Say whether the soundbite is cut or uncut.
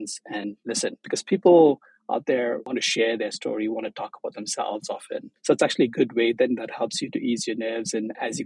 cut